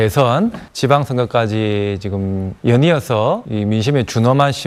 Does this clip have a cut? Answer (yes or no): no